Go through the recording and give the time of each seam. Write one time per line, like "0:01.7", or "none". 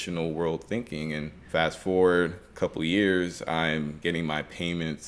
0:01.5
0:02.4
0:04.0